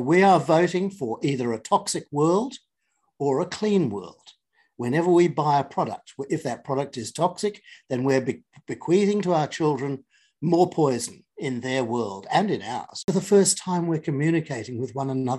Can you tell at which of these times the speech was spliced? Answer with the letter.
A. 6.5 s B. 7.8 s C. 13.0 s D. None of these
C